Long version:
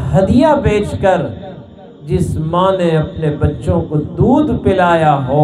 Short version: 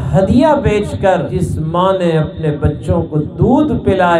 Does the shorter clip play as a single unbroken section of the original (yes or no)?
no